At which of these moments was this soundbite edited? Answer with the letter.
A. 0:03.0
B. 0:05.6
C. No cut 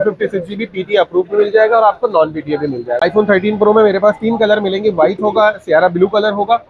A